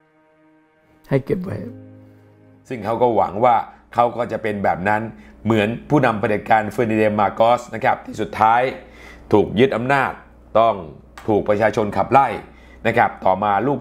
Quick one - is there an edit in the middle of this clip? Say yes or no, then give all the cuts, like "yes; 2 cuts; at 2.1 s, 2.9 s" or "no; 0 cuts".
yes; 1 cut; at 2.8 s